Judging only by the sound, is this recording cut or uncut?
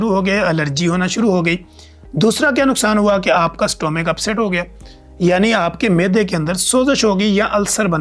uncut